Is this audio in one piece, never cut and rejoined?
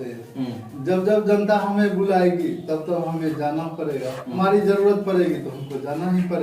no; 1 cut; at 4.2 s

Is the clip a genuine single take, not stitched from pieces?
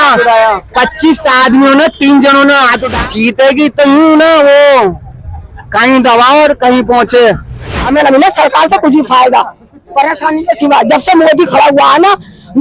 no; 2 cuts; at 2.9 s, 7.7 s

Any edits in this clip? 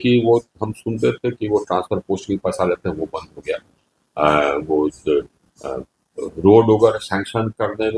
no; 0 cuts

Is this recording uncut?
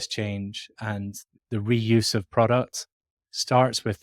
no; 1 cut; at 1.3 s

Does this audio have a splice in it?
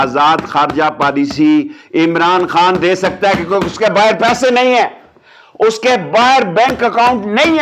no; 0 cuts

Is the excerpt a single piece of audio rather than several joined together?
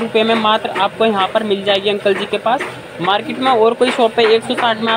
yes; 0 cuts

